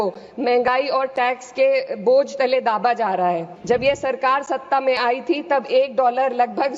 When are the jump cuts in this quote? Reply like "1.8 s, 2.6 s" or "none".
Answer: 3.5 s